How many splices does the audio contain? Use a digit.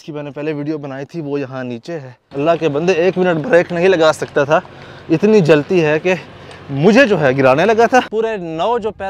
2